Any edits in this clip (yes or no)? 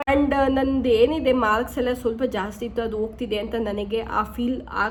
no